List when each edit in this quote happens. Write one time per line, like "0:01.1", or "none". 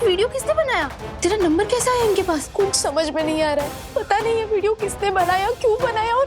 0:01.0
0:02.5
0:03.8